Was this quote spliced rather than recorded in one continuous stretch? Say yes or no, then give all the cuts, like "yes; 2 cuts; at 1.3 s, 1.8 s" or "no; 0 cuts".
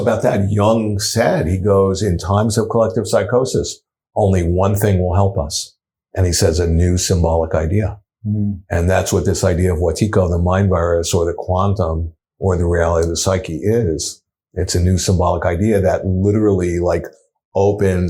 no; 0 cuts